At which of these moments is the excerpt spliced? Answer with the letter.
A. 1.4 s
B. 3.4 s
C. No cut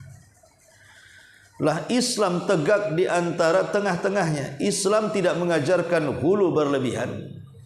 A